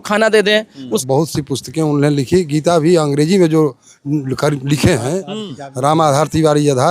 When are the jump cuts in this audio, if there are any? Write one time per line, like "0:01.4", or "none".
0:01.0